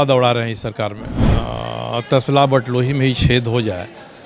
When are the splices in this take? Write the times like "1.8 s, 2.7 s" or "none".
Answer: 1.2 s